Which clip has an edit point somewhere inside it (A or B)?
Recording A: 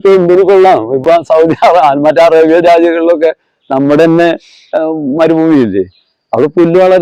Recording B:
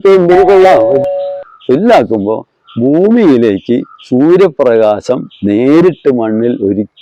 B